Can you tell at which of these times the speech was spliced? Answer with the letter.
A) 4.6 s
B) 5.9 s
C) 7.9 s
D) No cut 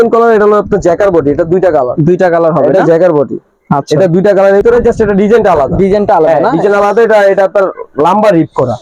A